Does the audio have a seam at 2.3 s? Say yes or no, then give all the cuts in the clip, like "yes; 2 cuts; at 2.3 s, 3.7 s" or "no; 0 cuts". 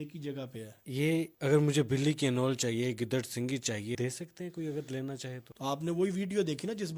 no; 3 cuts; at 0.9 s, 4.0 s, 5.5 s